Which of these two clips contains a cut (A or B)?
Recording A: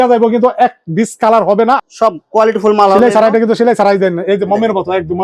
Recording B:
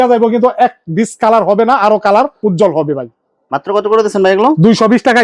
A